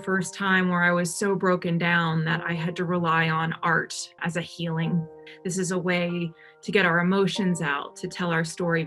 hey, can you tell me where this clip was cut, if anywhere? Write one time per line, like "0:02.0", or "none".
0:04.2
0:05.2